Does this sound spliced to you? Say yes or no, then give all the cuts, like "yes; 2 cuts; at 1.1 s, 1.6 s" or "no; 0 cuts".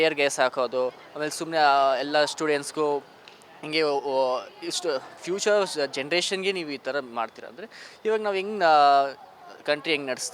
no; 0 cuts